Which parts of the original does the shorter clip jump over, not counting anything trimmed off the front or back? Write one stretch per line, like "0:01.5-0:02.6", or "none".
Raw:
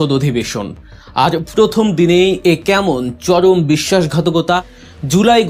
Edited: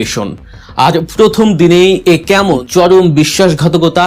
0:03.0-0:03.2